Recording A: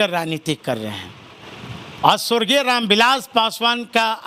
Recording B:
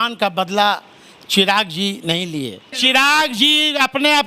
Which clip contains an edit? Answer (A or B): B